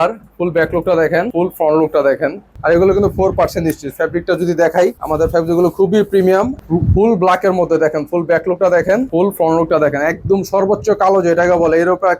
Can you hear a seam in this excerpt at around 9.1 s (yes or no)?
yes